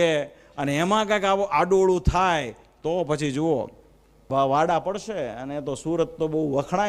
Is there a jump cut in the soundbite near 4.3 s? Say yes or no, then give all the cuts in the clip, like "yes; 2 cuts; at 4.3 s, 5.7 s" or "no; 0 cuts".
yes; 1 cut; at 4.3 s